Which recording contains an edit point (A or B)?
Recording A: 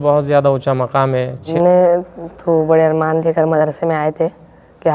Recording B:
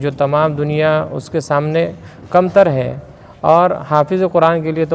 A